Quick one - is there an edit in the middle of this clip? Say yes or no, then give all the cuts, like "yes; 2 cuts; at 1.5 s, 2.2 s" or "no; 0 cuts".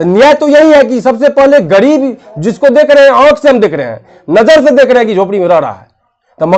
no; 0 cuts